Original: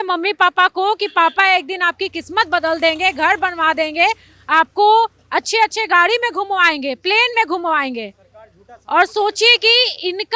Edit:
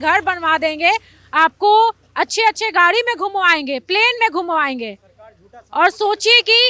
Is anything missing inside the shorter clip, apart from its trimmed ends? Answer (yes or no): no